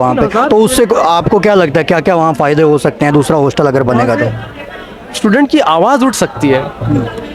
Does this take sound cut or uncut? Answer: uncut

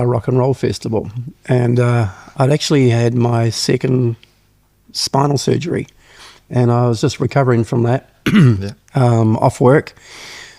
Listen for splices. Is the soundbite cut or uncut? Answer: uncut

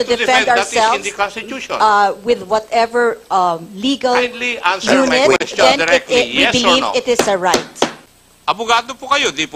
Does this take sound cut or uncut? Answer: cut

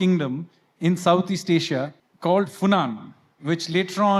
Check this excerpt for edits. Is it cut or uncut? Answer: cut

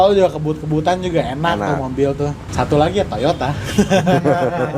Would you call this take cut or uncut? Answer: cut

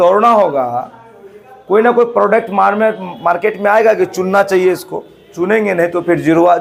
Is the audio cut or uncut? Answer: uncut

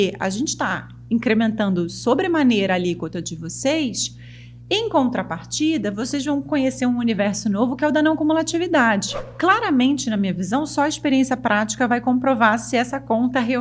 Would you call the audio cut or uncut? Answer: cut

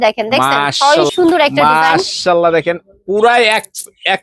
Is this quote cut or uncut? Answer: cut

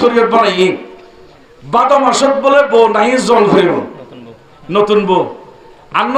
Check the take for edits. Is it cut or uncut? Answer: uncut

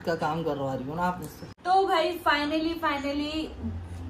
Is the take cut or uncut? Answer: cut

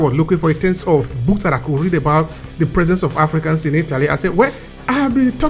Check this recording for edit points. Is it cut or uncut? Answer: uncut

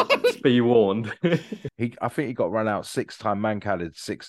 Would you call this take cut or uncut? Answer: cut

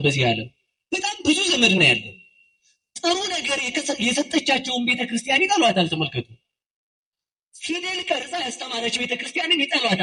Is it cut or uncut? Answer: uncut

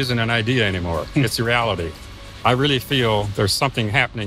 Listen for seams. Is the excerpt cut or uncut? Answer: cut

